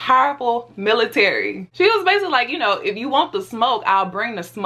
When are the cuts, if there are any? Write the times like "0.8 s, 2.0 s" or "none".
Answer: 1.7 s